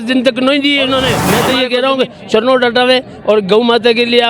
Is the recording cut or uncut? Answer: cut